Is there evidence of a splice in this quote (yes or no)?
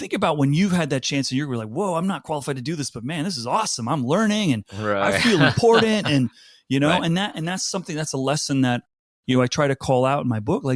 no